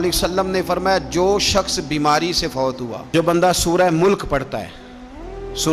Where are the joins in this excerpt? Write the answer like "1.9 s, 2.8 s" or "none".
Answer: 3.0 s